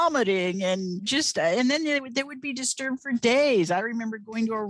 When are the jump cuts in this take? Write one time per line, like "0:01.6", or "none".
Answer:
none